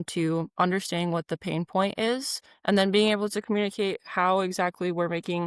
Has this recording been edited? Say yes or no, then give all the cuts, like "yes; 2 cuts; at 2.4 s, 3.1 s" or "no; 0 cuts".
no; 0 cuts